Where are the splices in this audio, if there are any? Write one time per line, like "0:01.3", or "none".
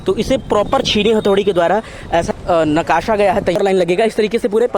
0:02.3
0:03.6